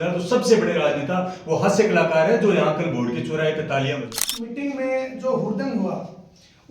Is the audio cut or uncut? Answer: cut